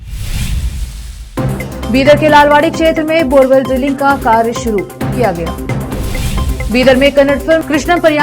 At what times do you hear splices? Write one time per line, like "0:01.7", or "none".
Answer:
0:01.2

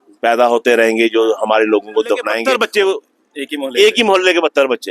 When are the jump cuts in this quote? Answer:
0:02.4

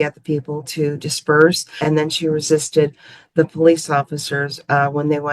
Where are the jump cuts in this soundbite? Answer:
0:01.7

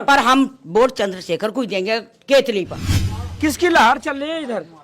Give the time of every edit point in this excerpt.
0:03.2

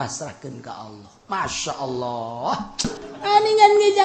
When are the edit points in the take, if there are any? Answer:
0:03.0

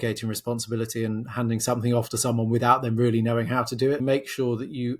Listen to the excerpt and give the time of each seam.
0:04.0

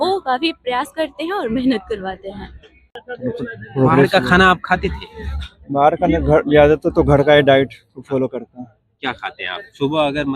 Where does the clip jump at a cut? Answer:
0:03.1

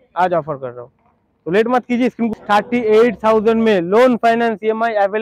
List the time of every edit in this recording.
0:02.6

